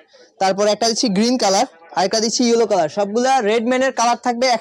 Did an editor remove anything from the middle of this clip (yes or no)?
no